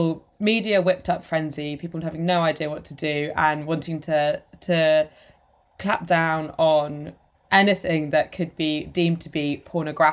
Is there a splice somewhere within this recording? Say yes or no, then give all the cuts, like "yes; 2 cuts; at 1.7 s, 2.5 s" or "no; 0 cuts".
no; 0 cuts